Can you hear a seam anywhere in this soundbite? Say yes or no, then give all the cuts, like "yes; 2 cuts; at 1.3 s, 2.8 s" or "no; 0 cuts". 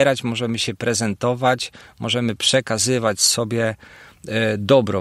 no; 0 cuts